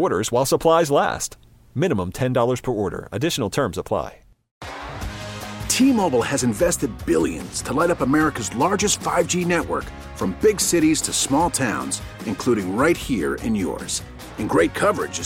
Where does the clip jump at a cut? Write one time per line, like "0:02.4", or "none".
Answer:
0:04.5